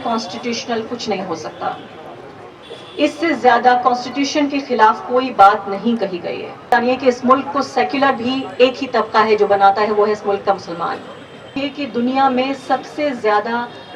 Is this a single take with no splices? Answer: no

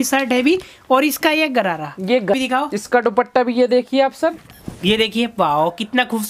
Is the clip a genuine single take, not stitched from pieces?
no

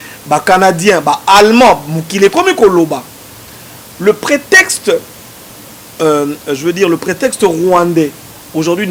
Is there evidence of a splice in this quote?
no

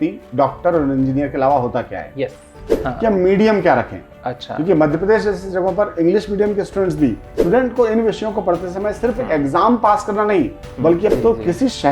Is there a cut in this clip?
yes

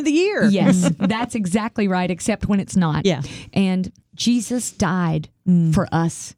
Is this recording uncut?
no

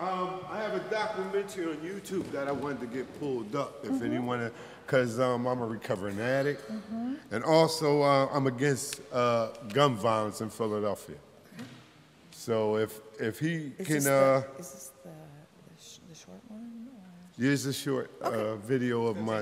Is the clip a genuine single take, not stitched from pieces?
yes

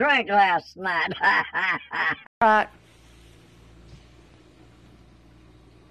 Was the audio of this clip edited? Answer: yes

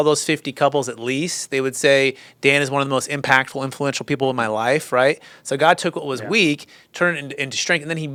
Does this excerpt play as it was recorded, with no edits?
yes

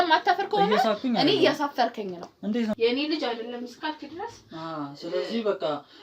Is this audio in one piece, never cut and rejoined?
no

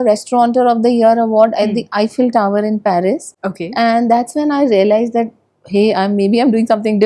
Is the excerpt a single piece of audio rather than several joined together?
yes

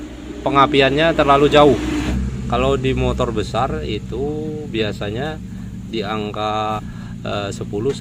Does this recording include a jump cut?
no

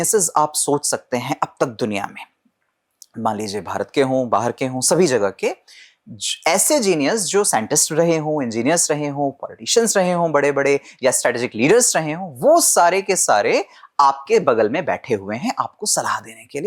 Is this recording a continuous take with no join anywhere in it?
yes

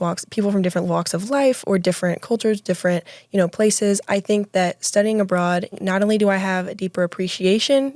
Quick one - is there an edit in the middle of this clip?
yes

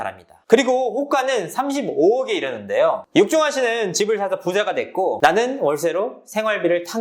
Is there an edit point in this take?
yes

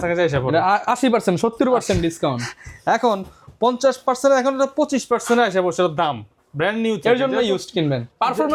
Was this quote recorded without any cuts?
yes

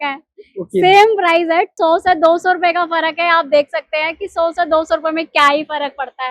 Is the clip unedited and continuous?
no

